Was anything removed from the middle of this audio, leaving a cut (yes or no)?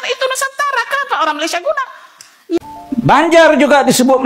yes